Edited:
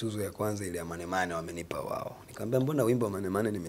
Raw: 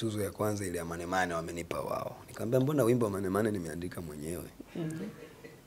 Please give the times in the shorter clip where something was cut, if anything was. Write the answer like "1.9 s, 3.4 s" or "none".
none